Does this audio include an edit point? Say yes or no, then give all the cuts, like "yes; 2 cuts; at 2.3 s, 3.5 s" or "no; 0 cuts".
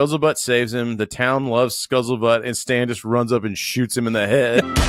no; 0 cuts